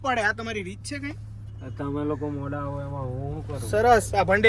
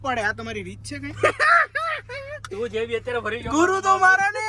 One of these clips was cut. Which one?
second; 1 cut; at 1.1 s

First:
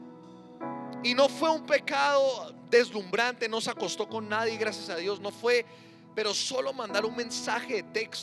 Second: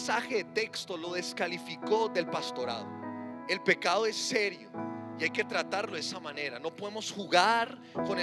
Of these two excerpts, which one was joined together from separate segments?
second; 1 cut; at 3.4 s

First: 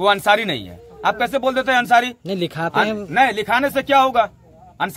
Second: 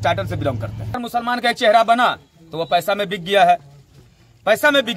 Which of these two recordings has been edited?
second; 1 cut; at 1.0 s

